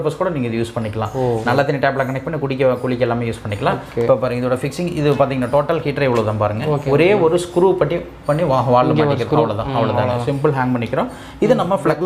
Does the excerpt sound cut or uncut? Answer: uncut